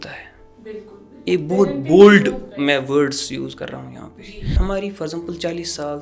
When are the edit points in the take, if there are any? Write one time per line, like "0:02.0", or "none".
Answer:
0:04.5

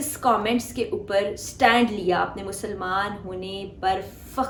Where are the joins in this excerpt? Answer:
none

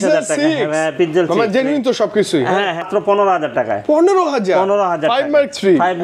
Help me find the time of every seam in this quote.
0:02.8

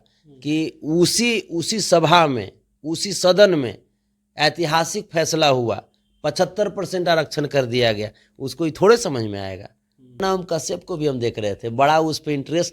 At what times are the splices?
0:10.2

